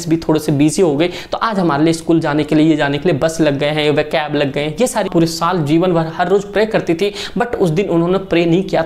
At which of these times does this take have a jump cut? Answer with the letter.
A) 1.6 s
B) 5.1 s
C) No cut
B